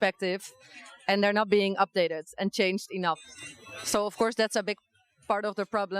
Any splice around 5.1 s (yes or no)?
no